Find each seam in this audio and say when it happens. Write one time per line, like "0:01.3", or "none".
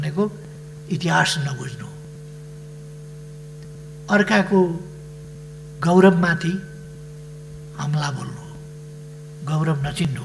none